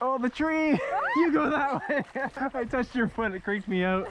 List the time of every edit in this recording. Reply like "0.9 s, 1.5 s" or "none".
2.3 s